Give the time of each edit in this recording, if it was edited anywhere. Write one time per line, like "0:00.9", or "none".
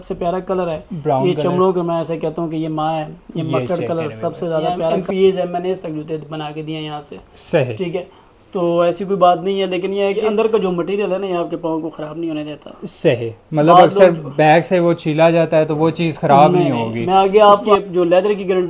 0:05.0
0:10.3
0:17.7